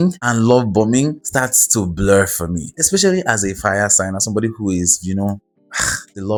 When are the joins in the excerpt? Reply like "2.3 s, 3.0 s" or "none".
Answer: none